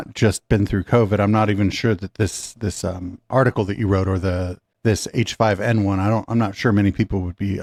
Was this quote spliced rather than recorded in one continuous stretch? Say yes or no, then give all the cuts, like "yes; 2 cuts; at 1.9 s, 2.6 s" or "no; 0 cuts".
no; 0 cuts